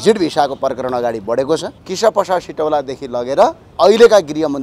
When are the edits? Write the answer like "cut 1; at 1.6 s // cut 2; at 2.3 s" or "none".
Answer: cut 1; at 1.8 s // cut 2; at 3.6 s